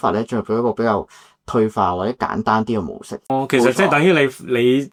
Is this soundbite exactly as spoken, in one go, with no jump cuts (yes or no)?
yes